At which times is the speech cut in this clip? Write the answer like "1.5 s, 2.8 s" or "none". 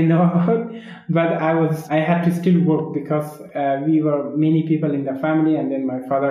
1.8 s